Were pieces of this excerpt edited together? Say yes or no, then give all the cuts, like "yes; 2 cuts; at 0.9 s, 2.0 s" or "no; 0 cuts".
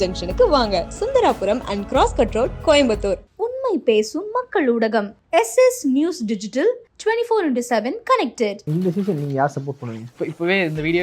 yes; 2 cuts; at 8.6 s, 10.1 s